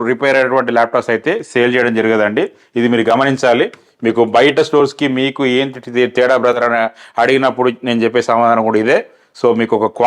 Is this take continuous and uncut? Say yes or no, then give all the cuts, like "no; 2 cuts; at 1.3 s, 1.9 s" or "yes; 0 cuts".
yes; 0 cuts